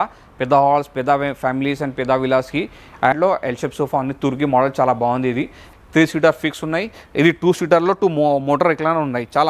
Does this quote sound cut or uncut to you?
cut